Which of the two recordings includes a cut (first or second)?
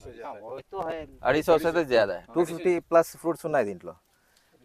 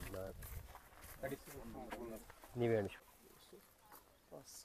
second